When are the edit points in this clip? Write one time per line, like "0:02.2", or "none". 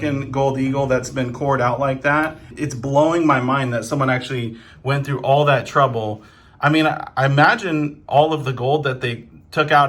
0:02.4